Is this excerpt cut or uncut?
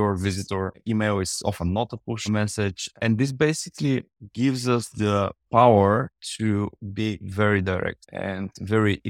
cut